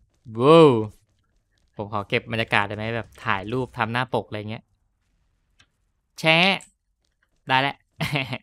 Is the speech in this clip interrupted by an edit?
no; 0 cuts

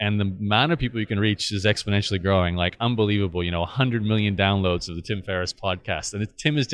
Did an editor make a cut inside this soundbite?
no; 0 cuts

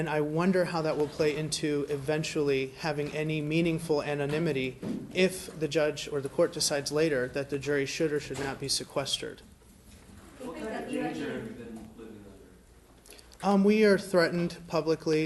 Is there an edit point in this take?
yes; 1 cut; at 10.5 s

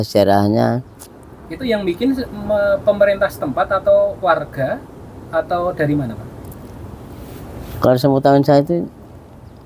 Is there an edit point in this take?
no; 0 cuts

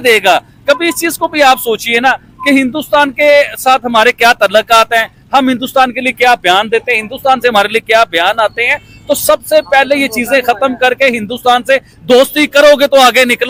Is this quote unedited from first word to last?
yes; 0 cuts

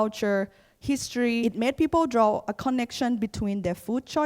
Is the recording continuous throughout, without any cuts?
no; 1 cut; at 1.4 s

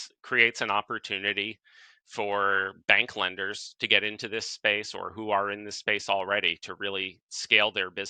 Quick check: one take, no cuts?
yes; 0 cuts

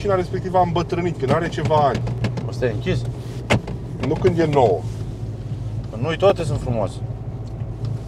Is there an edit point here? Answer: no; 0 cuts

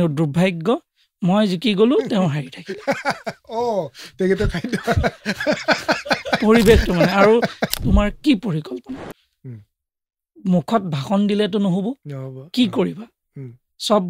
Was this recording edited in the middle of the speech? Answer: yes; 1 cut; at 7.8 s

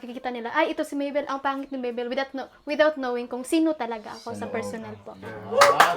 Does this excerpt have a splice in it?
no; 0 cuts

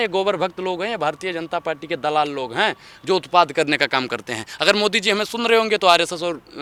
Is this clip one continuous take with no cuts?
yes; 0 cuts

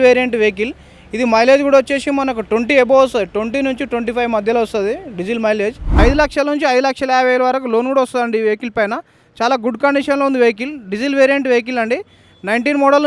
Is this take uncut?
no; 1 cut; at 5.9 s

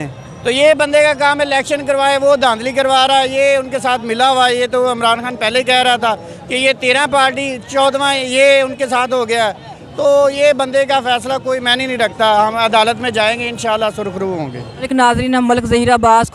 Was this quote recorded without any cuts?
yes; 0 cuts

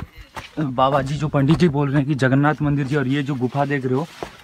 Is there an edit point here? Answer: no; 0 cuts

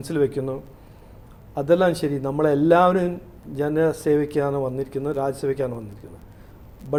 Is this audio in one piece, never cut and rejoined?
yes; 0 cuts

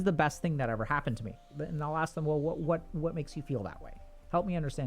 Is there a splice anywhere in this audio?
yes; 1 cut; at 1.5 s

